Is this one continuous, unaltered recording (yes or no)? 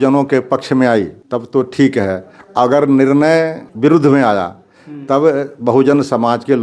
no